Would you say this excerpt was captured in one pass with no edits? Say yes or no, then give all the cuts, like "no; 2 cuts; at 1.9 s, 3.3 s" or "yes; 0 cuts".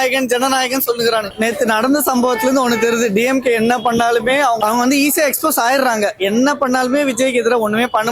no; 1 cut; at 1.3 s